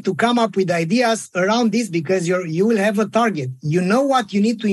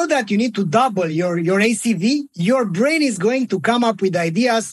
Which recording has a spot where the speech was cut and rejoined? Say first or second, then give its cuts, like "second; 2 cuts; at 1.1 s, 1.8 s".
second; 2 cuts; at 1.1 s, 2.3 s